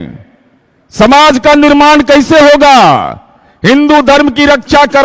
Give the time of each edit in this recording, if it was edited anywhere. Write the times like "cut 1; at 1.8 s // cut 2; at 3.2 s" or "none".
none